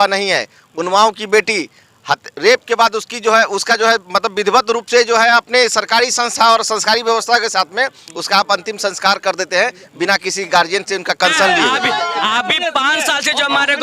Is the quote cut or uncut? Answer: cut